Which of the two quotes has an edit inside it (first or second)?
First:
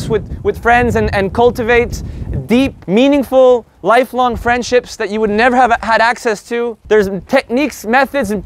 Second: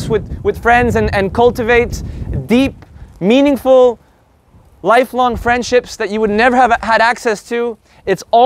first